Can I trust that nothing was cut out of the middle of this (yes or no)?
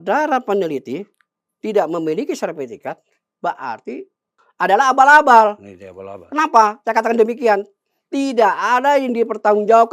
yes